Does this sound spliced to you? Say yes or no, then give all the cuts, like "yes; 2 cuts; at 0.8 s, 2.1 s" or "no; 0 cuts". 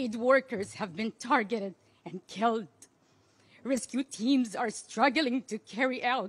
no; 0 cuts